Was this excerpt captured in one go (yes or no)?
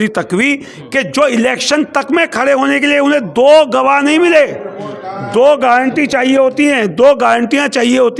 yes